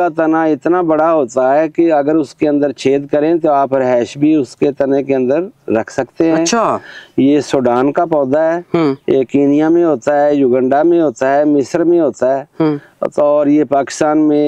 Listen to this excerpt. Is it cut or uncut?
uncut